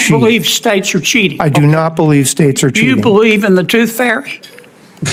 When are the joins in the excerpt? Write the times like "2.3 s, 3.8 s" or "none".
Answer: none